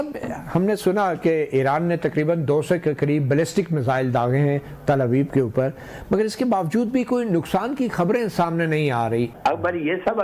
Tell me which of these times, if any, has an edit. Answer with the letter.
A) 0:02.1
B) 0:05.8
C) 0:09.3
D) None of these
C